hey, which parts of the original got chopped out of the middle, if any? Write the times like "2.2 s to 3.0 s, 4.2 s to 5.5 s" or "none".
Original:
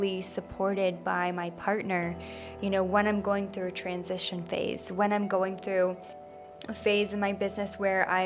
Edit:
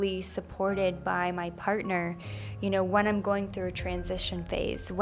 none